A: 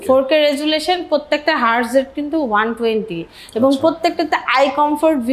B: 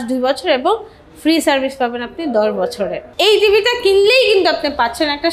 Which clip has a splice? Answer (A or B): B